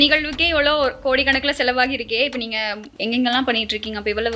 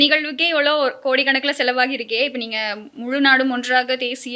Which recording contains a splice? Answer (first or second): first